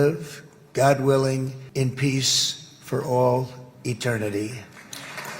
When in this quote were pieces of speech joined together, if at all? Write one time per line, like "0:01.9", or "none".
0:01.6